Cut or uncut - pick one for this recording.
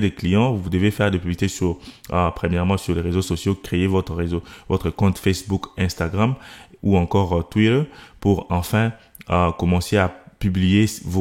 uncut